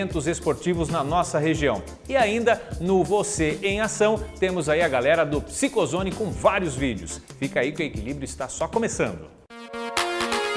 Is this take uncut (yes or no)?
no